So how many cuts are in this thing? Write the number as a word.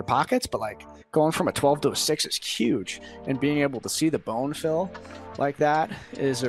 zero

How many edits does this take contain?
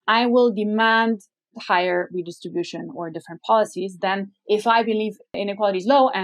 one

